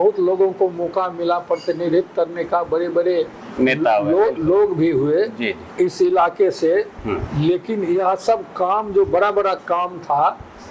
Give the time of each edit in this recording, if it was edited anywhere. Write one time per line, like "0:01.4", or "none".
none